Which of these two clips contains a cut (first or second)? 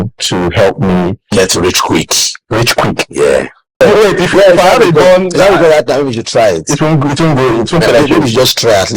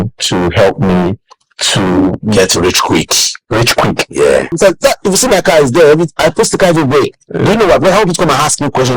first